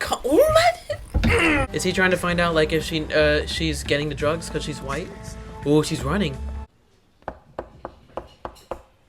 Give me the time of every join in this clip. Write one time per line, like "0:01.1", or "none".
0:01.6
0:06.5